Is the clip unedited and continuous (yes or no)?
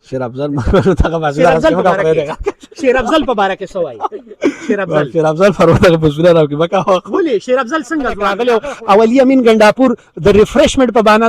no